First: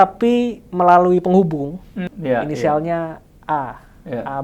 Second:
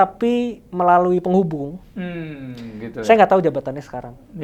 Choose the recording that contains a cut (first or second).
first